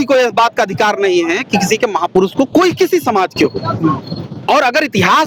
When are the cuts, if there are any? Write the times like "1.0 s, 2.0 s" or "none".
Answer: none